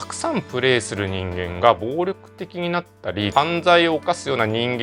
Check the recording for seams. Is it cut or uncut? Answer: uncut